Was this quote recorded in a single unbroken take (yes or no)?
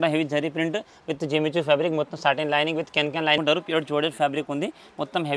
no